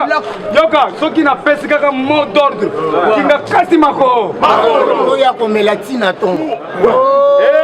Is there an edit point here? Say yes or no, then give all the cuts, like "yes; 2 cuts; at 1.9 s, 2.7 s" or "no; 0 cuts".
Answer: yes; 1 cut; at 6.6 s